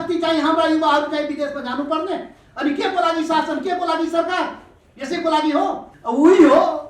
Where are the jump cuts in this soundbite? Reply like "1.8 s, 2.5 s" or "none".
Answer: 5.9 s